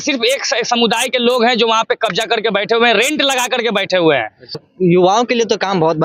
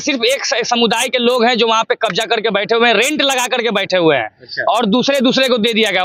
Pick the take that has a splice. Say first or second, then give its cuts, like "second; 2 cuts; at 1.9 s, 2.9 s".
first; 1 cut; at 4.6 s